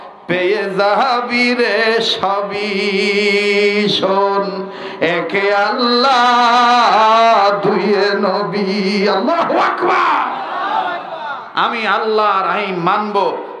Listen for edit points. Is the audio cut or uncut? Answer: uncut